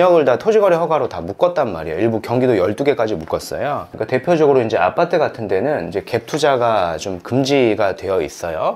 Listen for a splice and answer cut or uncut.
uncut